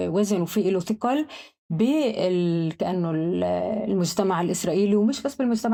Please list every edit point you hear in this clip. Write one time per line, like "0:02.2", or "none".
none